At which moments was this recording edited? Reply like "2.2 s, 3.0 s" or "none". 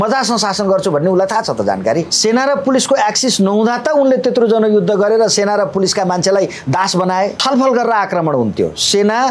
2.1 s, 7.4 s